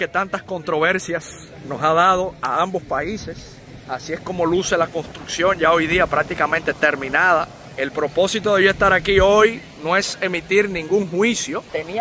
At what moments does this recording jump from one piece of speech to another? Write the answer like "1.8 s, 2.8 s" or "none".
none